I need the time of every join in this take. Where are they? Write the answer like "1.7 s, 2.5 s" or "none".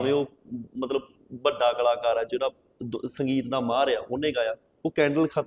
none